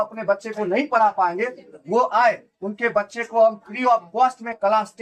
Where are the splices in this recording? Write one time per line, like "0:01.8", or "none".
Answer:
none